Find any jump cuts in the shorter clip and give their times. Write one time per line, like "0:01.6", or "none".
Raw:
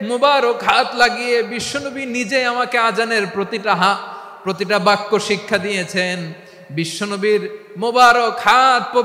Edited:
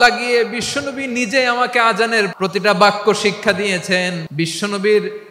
0:02.3
0:04.2